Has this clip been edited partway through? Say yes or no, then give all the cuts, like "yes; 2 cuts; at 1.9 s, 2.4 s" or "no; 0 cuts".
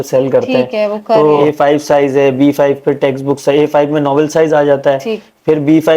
yes; 1 cut; at 1.4 s